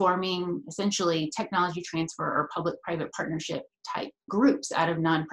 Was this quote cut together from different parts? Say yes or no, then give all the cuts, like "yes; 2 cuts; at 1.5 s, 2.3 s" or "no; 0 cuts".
yes; 1 cut; at 4.3 s